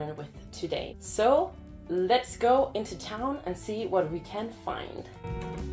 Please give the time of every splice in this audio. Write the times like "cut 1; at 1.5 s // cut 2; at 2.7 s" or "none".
none